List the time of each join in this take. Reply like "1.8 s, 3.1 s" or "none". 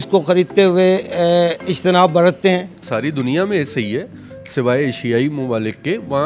2.8 s

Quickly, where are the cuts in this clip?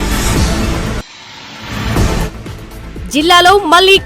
1.7 s

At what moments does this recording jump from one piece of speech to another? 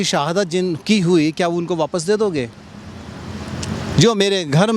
none

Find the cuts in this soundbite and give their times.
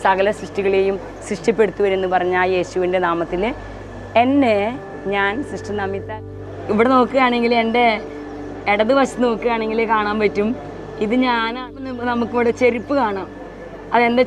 6.0 s, 12.0 s

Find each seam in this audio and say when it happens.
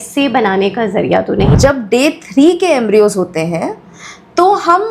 1.6 s

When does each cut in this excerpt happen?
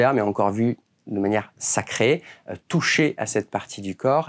none

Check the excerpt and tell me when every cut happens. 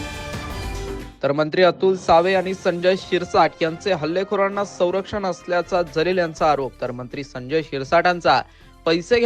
0.9 s

